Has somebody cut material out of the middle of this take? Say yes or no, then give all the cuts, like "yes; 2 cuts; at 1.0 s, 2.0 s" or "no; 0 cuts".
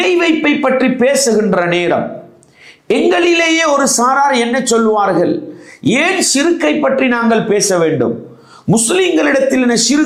no; 0 cuts